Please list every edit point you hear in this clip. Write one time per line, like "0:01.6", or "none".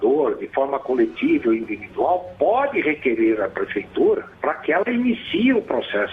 0:04.3

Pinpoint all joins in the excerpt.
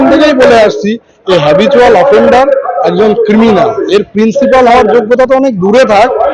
none

